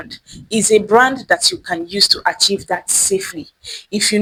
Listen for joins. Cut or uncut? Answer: uncut